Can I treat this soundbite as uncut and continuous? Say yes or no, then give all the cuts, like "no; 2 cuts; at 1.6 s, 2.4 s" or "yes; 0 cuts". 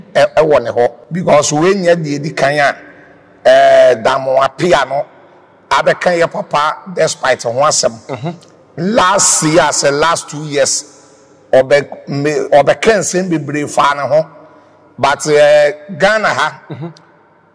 no; 1 cut; at 1.1 s